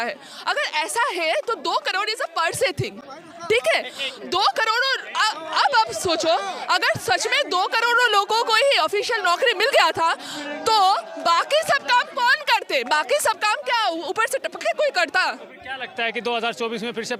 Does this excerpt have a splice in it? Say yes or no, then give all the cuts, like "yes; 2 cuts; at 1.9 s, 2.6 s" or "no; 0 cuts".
no; 0 cuts